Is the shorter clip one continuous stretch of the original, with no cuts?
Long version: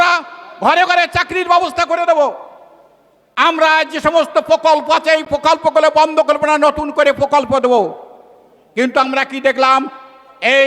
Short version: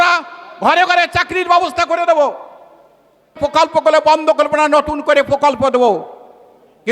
no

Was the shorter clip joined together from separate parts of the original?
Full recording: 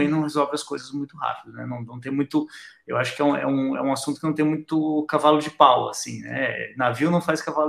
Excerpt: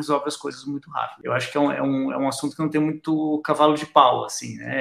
yes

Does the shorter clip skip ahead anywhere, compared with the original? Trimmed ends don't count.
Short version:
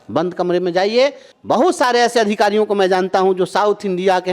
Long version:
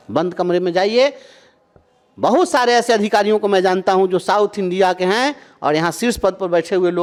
yes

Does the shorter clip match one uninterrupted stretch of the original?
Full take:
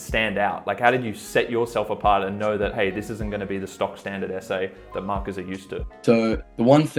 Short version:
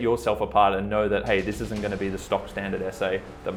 yes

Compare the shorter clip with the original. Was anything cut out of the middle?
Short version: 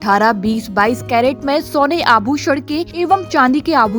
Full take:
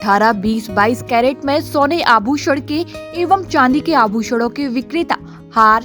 yes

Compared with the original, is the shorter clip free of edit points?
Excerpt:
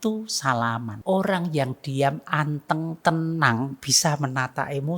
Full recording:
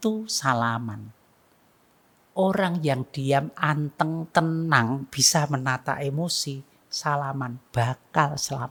no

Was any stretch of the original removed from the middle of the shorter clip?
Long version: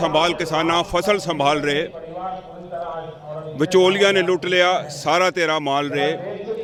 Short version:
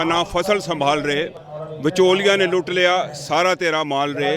yes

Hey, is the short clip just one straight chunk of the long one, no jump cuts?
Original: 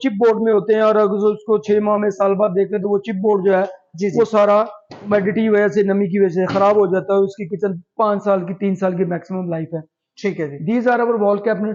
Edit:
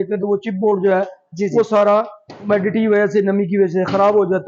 yes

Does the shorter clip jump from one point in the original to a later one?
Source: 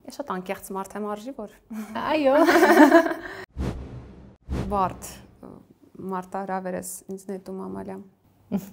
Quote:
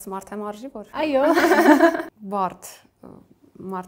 yes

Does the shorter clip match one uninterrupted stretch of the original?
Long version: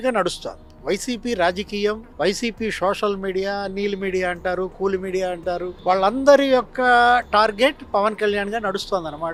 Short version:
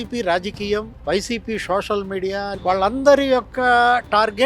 no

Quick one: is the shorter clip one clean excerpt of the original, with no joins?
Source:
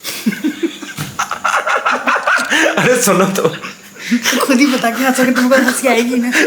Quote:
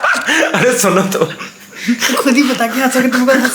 yes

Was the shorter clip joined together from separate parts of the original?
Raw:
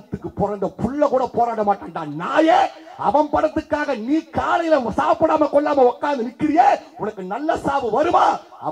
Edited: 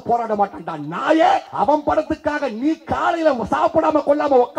yes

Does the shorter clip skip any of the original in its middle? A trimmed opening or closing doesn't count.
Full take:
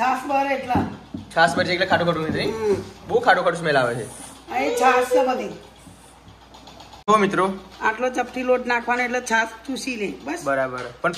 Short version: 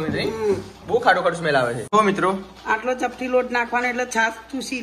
yes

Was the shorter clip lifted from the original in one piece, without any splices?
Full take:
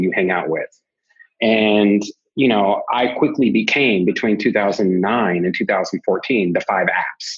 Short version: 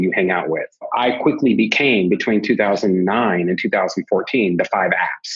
no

